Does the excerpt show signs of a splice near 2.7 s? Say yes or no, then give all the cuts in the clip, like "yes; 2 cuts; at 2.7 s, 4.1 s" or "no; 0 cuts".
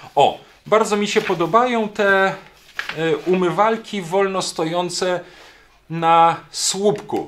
no; 0 cuts